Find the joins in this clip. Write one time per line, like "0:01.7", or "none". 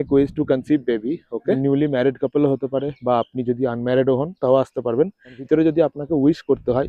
0:01.6
0:05.5